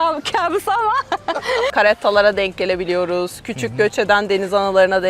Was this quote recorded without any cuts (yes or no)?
no